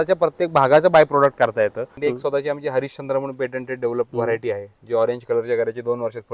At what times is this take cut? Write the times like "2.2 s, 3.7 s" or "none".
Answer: 1.9 s